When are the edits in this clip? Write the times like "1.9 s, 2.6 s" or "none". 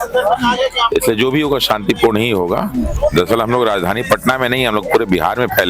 2.9 s